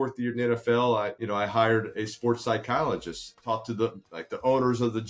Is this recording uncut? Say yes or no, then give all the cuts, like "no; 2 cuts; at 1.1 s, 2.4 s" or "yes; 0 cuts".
no; 2 cuts; at 1.2 s, 3.3 s